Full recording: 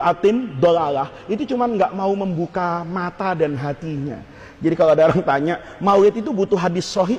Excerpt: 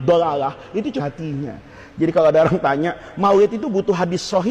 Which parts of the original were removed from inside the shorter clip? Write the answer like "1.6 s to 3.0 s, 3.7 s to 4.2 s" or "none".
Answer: 1.5 s to 3.6 s